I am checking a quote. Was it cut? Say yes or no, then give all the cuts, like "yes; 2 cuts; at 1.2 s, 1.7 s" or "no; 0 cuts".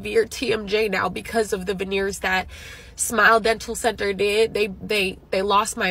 no; 0 cuts